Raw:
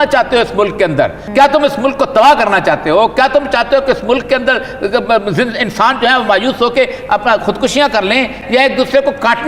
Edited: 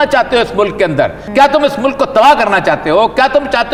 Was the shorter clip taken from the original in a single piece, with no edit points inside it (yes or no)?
yes